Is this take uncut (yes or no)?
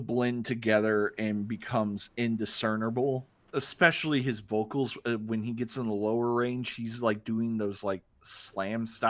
no